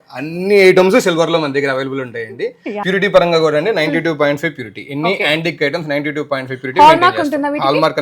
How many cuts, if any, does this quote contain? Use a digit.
1